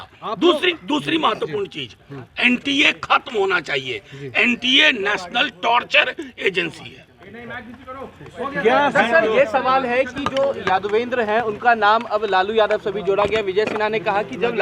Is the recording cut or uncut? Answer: uncut